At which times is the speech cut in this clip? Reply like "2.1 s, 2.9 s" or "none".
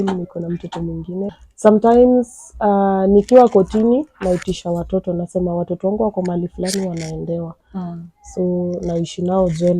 1.3 s